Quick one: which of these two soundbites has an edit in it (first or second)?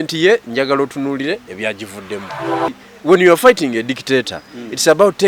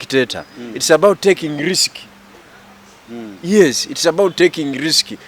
first